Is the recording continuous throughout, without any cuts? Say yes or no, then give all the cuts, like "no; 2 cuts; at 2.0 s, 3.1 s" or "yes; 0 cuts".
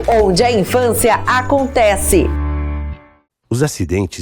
yes; 0 cuts